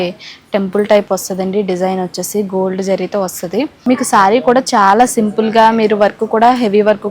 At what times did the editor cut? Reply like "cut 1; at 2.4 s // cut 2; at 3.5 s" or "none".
cut 1; at 3.7 s